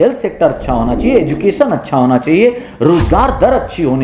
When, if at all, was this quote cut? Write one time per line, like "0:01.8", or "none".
none